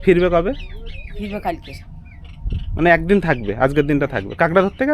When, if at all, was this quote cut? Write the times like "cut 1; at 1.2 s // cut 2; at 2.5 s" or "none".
none